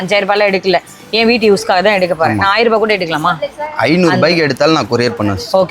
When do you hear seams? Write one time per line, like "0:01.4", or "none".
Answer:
none